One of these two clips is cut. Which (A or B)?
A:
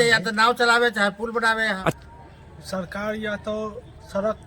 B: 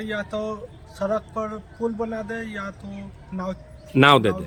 A